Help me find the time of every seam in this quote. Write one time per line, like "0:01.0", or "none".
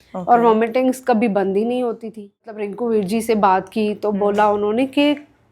0:02.7